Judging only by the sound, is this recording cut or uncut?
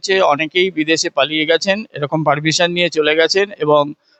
uncut